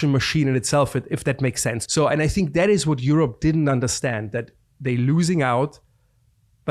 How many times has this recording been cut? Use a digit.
1